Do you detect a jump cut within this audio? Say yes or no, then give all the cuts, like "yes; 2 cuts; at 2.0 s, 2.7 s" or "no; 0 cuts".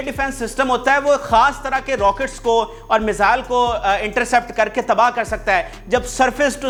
no; 0 cuts